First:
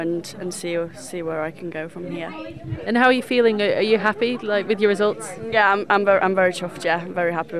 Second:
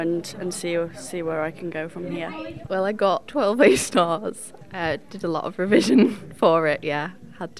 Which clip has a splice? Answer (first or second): second